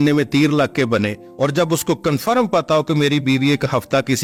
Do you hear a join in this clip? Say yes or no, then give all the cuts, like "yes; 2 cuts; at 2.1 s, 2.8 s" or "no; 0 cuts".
no; 0 cuts